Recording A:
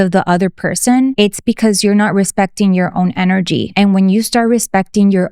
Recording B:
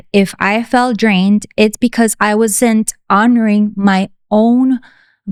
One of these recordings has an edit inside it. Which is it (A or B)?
A